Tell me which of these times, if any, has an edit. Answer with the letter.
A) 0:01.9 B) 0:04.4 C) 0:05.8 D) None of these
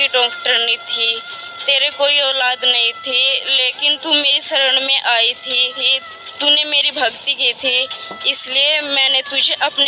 C